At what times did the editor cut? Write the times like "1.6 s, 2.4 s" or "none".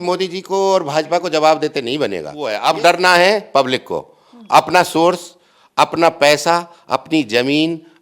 2.5 s